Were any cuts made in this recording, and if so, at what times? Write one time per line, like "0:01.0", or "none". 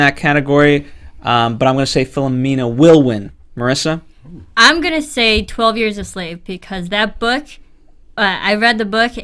none